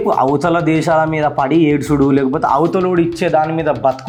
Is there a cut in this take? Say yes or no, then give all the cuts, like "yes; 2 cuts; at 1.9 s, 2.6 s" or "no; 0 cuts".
no; 0 cuts